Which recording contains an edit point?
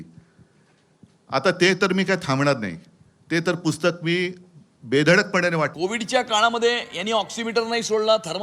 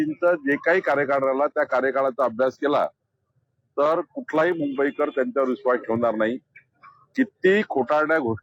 first; 1 cut; at 5.7 s

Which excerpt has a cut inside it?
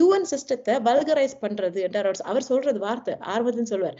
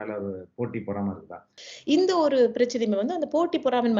second; 1 cut; at 1.4 s

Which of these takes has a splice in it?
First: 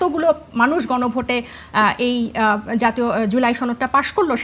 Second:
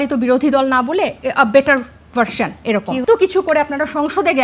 second; 1 cut; at 3.0 s

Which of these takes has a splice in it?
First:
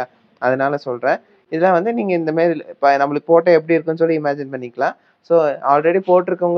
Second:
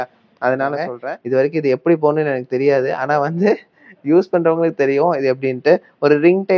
second; 1 cut; at 1.0 s

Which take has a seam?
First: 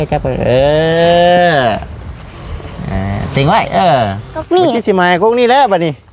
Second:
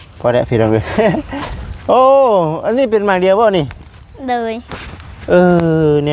first; 1 cut; at 4.4 s

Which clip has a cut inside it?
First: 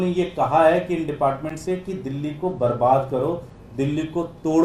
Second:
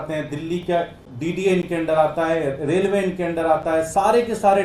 second; 1 cut; at 1.0 s

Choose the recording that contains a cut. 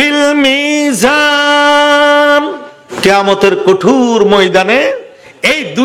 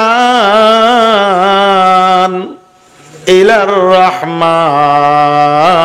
first; 1 cut; at 2.8 s

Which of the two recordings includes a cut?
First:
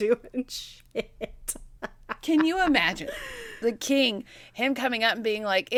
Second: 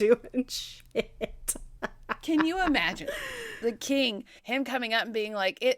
second; 1 cut; at 4.3 s

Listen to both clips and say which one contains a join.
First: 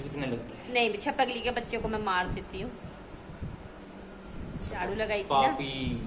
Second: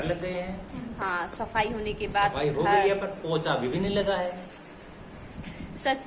first; 1 cut; at 4.8 s

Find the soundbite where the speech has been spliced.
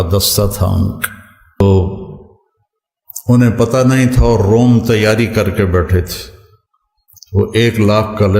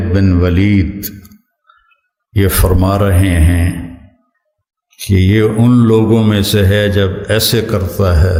first; 1 cut; at 1.6 s

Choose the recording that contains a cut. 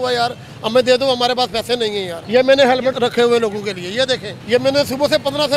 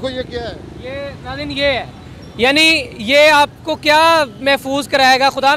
first; 3 cuts; at 2.1 s, 3.0 s, 4.3 s

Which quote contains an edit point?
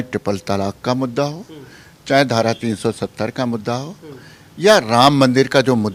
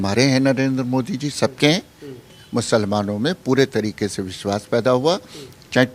second; 1 cut; at 2.4 s

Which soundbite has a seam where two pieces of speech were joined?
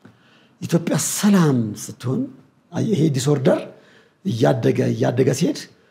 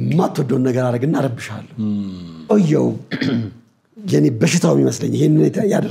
second; 1 cut; at 2.5 s

